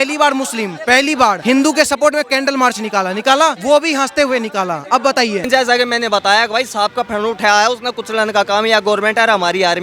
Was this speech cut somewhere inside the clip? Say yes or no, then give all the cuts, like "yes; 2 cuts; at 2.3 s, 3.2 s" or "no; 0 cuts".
yes; 3 cuts; at 1.4 s, 3.6 s, 5.5 s